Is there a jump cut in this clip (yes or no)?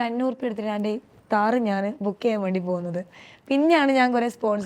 no